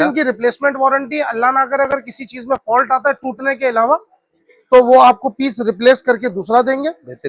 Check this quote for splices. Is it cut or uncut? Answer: uncut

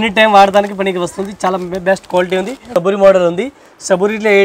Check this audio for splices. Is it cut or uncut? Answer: cut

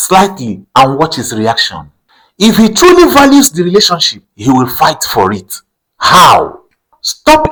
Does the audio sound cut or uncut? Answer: uncut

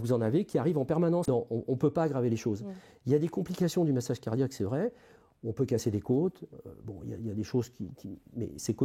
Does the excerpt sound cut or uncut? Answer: cut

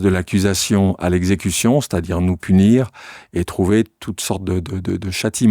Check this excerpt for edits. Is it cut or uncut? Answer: uncut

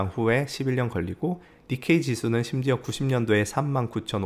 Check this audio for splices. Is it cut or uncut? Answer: cut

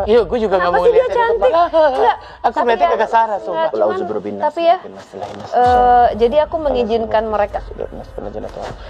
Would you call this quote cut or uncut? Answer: uncut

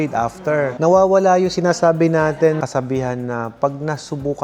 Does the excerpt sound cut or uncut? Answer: cut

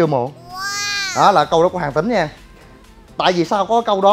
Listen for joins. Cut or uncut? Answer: uncut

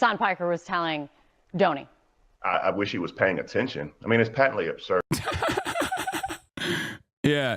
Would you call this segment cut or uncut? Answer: cut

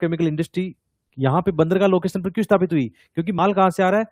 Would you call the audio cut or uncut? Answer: uncut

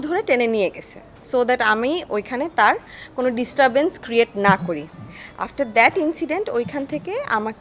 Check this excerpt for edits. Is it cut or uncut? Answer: uncut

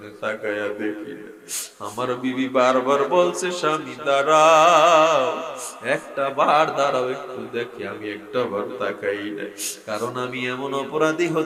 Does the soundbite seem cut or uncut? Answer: uncut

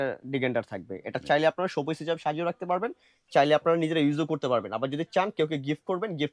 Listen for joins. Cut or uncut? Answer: uncut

